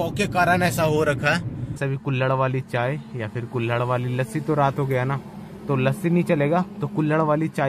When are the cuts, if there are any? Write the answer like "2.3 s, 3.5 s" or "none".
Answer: 1.8 s